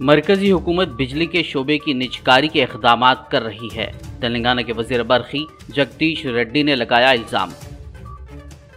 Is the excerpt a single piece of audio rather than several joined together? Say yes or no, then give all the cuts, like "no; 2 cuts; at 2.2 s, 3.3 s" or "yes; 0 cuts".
yes; 0 cuts